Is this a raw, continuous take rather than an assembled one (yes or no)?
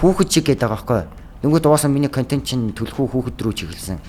yes